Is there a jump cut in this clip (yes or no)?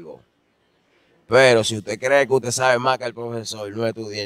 no